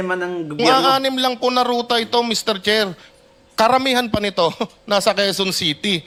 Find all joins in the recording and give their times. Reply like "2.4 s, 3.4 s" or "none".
none